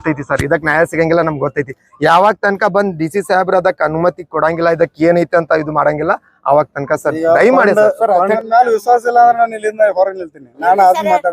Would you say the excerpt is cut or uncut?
cut